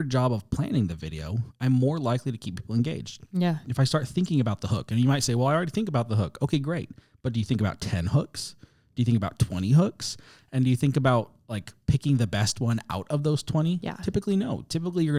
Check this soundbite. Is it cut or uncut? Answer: uncut